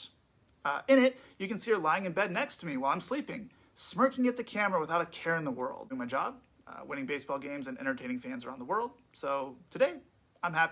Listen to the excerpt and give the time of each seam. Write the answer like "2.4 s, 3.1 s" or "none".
5.8 s